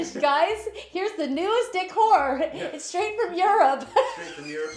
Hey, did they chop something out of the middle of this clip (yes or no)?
no